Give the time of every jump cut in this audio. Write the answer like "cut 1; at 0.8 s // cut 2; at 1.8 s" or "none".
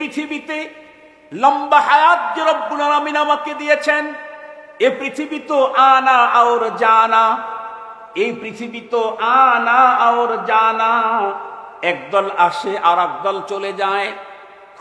none